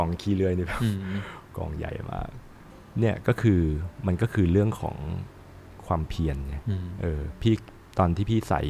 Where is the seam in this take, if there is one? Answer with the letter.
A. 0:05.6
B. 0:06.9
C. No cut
C